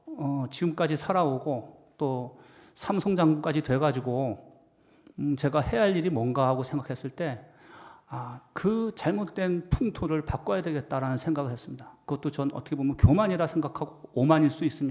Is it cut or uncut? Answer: uncut